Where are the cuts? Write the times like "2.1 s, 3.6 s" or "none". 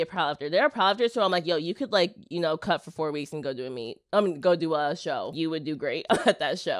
5.3 s